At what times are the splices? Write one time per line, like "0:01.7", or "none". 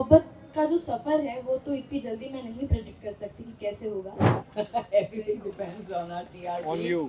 0:04.4

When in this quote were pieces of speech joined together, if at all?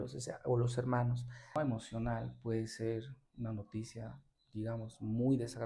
0:01.6

